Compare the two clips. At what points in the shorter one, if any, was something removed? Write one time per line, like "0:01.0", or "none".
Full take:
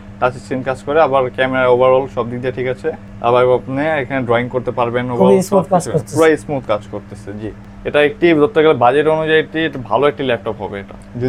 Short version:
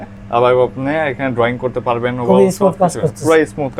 none